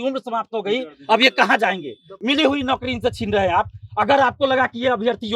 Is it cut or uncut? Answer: cut